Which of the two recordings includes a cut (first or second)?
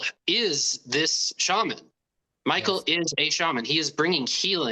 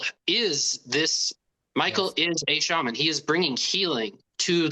second